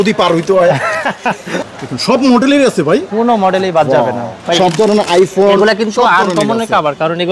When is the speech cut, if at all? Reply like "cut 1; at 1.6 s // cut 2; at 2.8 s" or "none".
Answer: cut 1; at 1.5 s // cut 2; at 4.4 s